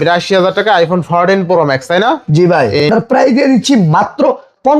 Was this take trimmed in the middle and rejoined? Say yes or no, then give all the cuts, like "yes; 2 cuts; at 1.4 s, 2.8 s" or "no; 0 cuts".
yes; 1 cut; at 2.9 s